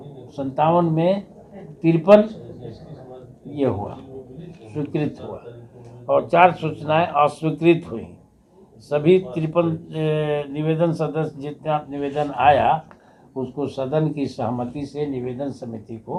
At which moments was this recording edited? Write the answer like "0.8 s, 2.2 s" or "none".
none